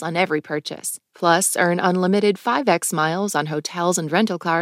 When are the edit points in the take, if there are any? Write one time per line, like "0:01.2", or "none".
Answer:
none